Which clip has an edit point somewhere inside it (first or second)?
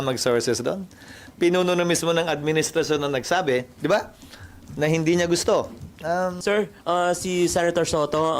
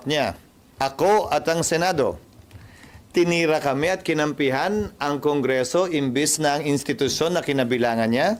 first